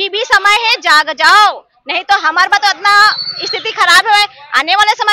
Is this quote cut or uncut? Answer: uncut